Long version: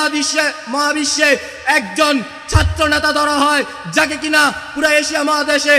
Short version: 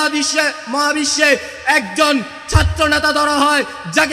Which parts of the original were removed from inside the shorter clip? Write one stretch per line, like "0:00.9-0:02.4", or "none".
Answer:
none